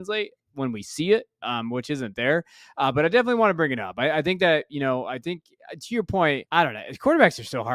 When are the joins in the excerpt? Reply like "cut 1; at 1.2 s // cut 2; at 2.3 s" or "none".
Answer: cut 1; at 6.4 s